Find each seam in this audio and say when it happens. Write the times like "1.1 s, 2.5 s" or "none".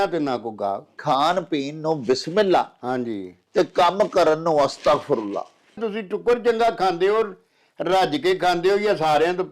1.0 s, 5.8 s